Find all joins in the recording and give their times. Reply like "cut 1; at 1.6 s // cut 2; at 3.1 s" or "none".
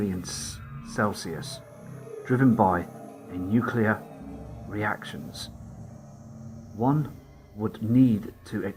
none

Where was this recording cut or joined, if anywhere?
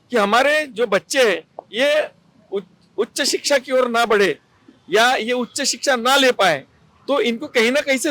none

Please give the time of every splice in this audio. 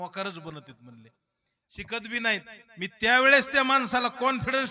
none

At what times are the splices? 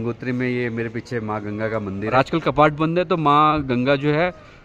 cut 1; at 2.1 s

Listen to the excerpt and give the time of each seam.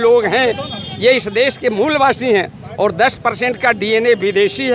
none

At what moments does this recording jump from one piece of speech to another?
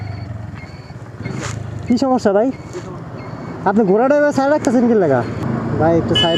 cut 1; at 5.4 s

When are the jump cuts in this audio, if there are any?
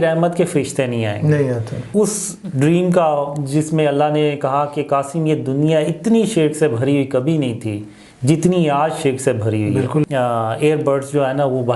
cut 1; at 1.9 s // cut 2; at 10.1 s

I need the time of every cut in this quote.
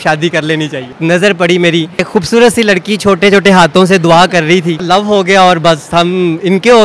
cut 1; at 0.9 s // cut 2; at 2.1 s // cut 3; at 4.8 s

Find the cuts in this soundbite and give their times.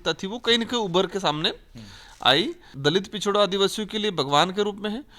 cut 1; at 2.7 s

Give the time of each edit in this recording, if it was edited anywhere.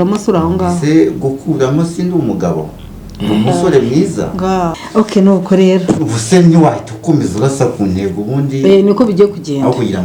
cut 1; at 4.8 s

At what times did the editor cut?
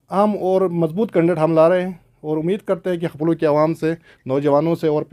none

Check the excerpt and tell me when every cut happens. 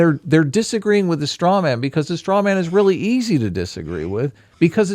none

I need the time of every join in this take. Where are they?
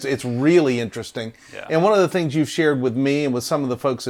none

